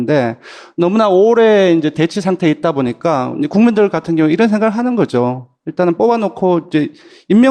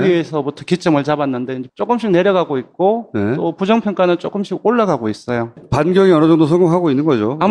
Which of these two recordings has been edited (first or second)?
second